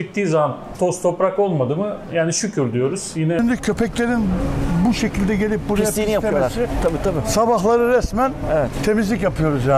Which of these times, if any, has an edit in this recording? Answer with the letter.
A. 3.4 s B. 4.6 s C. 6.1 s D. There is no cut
A